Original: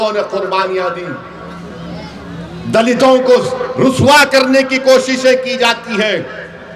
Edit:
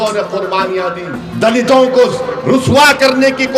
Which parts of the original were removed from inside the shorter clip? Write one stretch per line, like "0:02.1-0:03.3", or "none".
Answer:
0:01.2-0:02.5